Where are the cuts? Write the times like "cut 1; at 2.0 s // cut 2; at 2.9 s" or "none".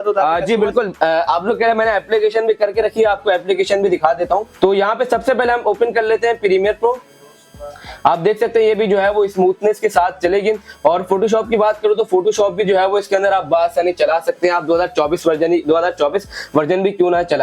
cut 1; at 4.5 s